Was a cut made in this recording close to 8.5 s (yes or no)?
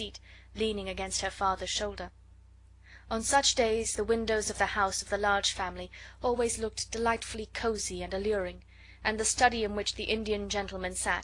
no